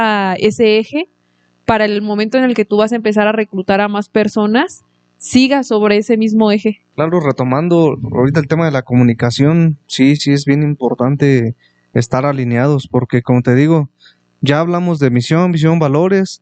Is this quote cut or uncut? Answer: cut